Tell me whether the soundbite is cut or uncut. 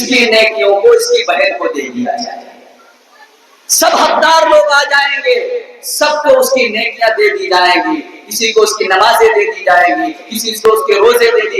uncut